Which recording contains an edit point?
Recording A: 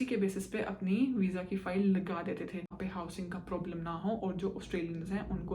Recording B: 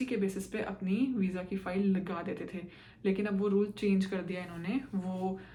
A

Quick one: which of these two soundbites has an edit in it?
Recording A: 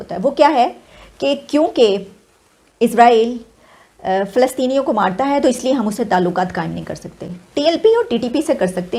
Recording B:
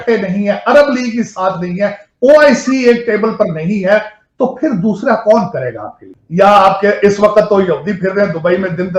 B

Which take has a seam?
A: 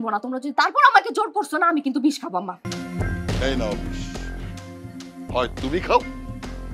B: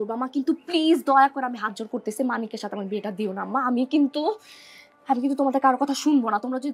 A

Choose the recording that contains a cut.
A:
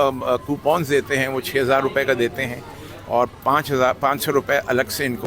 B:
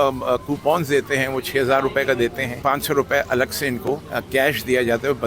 B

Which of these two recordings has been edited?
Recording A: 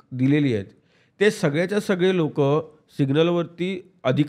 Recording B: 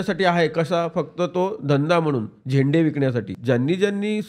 B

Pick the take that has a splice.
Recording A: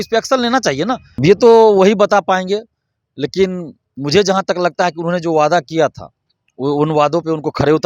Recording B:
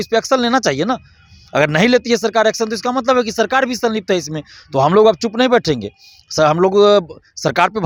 A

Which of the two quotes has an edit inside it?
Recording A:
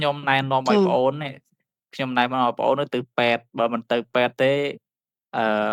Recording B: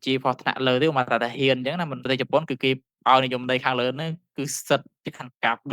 B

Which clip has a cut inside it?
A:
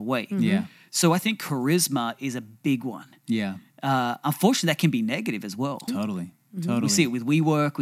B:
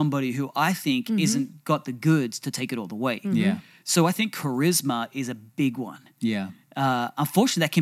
A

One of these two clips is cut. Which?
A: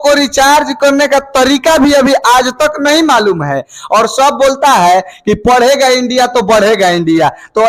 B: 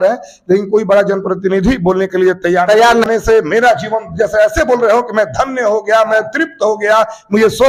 B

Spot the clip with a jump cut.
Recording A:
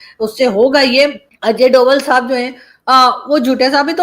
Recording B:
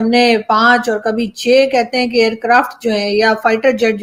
A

